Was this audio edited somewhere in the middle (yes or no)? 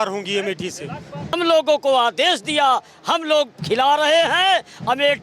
yes